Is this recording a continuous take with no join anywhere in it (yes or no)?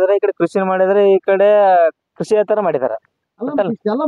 yes